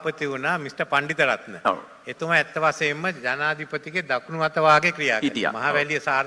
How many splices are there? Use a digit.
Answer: 0